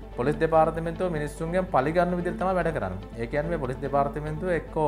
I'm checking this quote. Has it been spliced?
no; 0 cuts

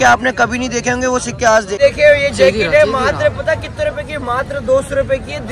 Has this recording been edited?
yes; 1 cut; at 1.8 s

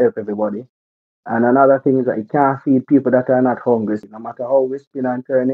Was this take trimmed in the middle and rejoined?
yes; 1 cut; at 4.0 s

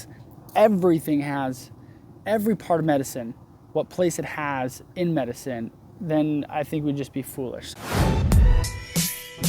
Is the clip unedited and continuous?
no; 1 cut; at 7.7 s

